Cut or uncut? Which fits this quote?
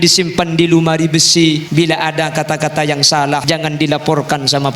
cut